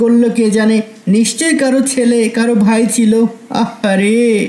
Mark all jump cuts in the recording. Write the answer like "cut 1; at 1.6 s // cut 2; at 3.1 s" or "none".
none